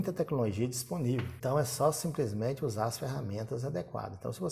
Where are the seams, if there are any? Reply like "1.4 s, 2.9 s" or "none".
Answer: 1.3 s

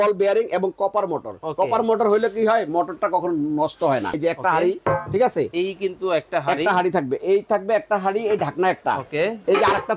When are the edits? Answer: 4.2 s

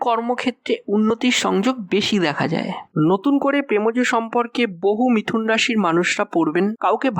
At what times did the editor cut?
2.9 s

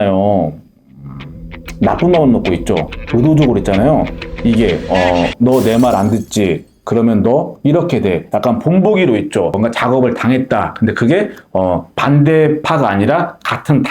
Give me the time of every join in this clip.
9.5 s

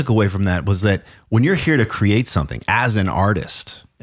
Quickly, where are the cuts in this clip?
none

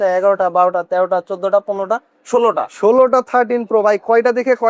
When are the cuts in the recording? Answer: none

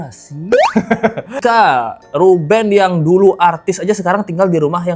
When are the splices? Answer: 1.4 s

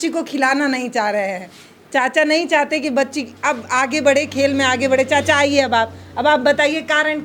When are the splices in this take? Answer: none

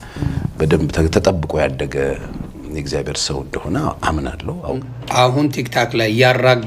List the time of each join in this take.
4.9 s

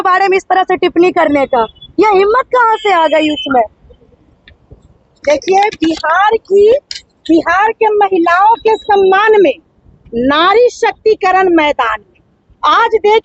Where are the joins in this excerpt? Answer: none

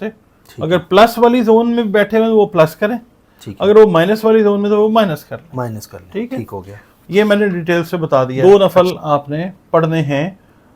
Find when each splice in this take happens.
8.3 s

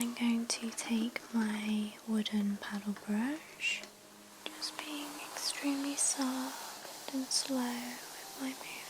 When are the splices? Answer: 4.2 s

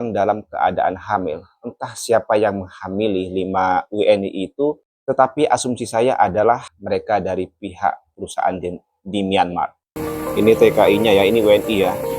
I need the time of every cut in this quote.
4.9 s, 6.7 s, 9.9 s

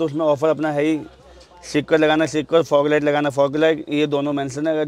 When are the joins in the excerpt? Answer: none

